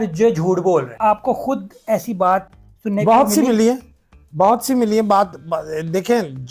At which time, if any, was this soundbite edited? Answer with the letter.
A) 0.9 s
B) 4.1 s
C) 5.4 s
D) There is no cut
A